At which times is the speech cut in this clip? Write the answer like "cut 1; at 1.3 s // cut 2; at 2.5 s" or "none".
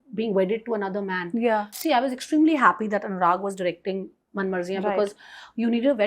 cut 1; at 1.7 s